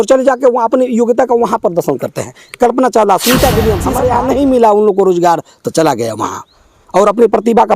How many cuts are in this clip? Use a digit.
1